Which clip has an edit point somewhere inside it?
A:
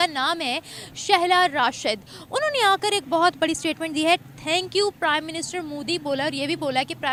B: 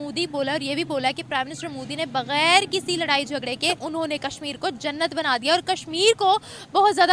B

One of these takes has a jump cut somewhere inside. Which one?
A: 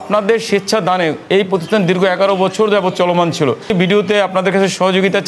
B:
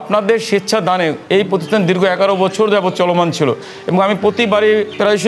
A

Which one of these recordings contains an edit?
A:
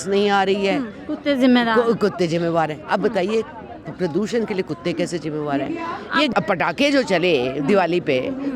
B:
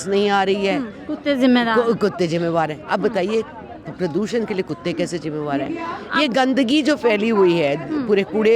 A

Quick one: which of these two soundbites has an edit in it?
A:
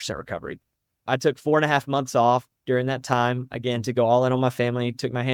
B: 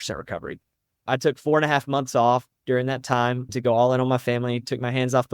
B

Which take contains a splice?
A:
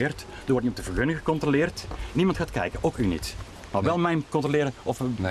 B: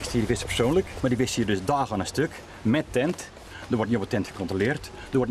B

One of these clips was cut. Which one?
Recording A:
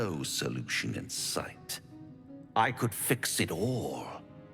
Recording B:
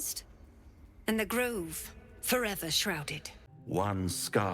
B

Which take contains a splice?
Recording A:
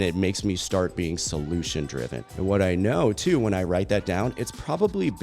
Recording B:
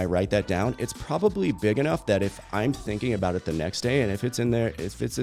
A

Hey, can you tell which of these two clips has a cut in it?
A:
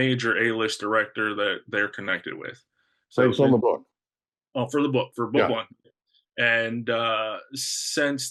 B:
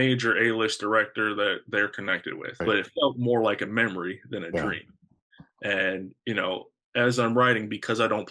B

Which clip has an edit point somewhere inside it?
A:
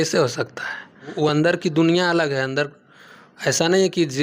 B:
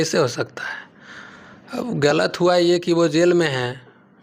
A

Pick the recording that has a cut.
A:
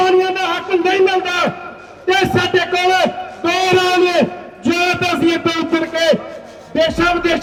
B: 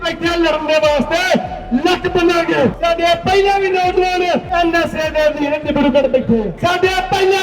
B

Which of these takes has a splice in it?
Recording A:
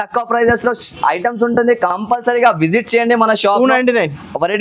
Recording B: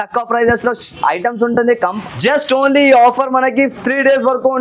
B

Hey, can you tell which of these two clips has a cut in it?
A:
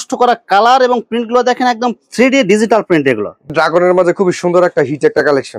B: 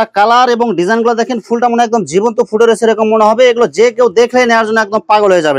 A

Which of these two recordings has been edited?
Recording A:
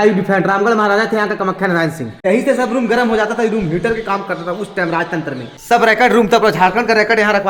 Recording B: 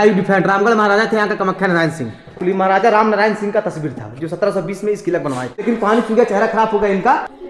A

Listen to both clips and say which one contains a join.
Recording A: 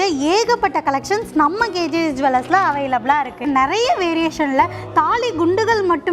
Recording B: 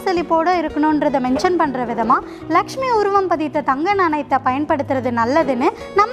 A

